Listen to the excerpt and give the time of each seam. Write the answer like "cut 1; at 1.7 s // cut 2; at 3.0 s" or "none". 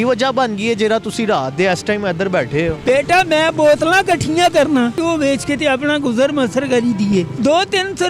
cut 1; at 2.8 s // cut 2; at 5.0 s // cut 3; at 7.3 s